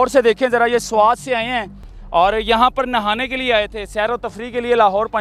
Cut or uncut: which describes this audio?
uncut